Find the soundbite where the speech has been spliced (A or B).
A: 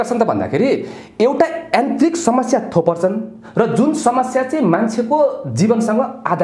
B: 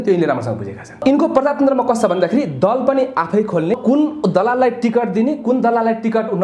B